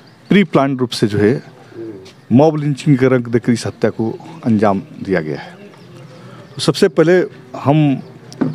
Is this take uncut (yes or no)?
yes